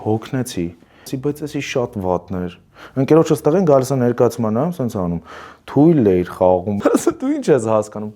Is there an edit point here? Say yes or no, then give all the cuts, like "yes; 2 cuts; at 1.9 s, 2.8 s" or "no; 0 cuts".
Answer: yes; 2 cuts; at 1.1 s, 6.8 s